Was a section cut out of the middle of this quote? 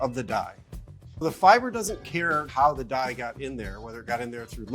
yes; 2 cuts; at 1.2 s, 2.5 s

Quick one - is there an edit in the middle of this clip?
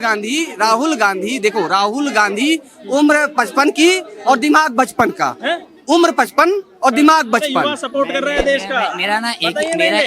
no; 0 cuts

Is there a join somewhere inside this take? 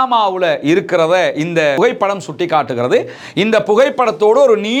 no; 0 cuts

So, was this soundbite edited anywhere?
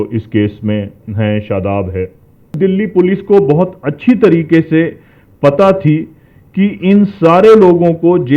yes; 1 cut; at 2.5 s

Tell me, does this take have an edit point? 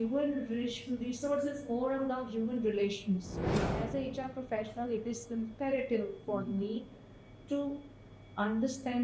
yes; 1 cut; at 3.6 s

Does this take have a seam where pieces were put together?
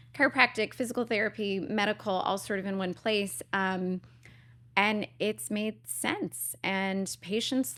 no; 0 cuts

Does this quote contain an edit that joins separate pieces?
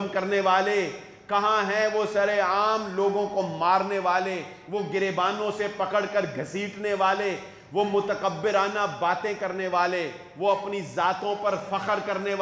no; 0 cuts

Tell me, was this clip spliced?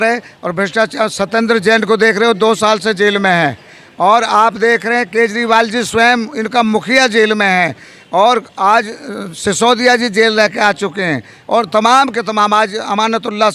no; 0 cuts

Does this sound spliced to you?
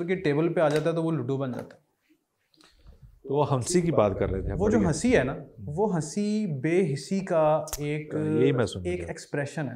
no; 0 cuts

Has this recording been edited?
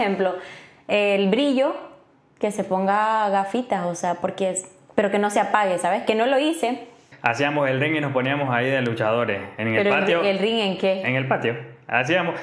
yes; 1 cut; at 7.1 s

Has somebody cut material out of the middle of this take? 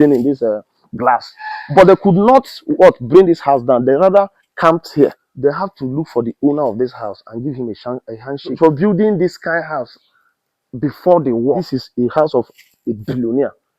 yes; 3 cuts; at 5.2 s, 8.6 s, 11.7 s

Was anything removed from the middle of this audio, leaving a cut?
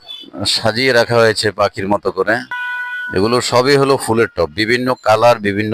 yes; 1 cut; at 2.6 s

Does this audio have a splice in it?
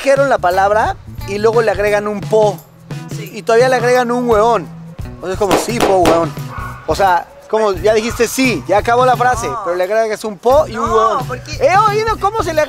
no; 0 cuts

